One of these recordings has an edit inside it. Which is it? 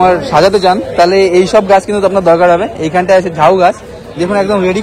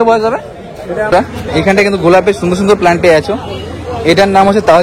second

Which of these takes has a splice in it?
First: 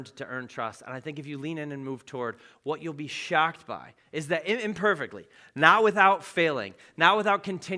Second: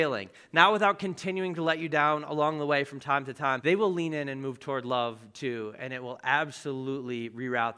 second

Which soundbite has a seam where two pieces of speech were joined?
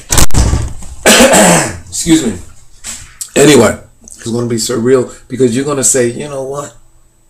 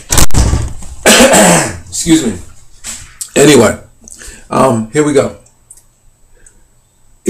second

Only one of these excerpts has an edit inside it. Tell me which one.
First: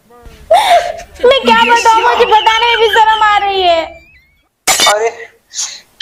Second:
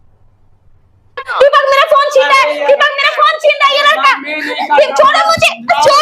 second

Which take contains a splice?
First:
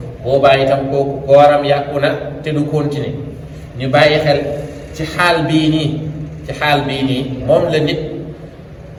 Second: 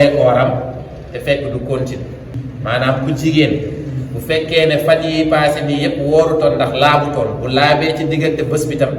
second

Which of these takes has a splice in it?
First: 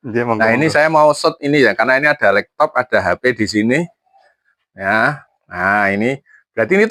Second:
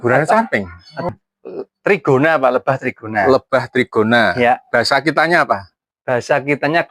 second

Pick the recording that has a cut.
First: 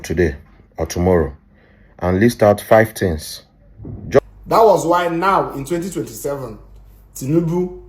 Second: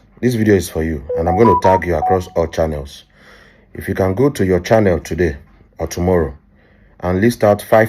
first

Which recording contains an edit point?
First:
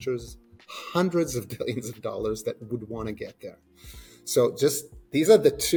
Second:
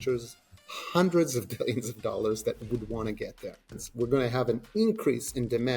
second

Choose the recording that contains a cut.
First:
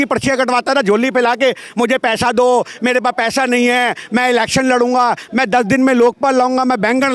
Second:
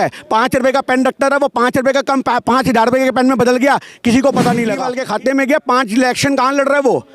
second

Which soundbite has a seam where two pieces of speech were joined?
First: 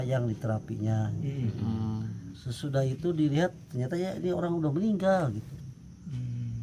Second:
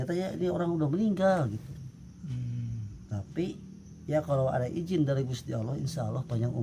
first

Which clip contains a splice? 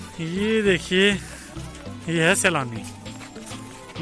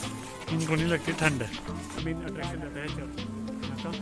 second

